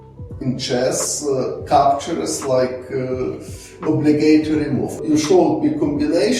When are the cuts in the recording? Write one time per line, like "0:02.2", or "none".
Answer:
0:04.9